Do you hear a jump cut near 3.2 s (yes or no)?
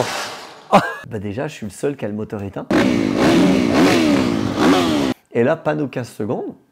no